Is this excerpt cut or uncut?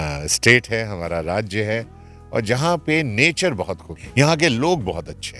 cut